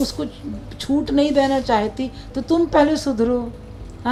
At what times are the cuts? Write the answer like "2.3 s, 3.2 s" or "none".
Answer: none